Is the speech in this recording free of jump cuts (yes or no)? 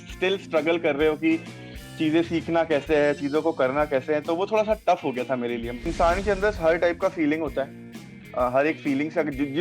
no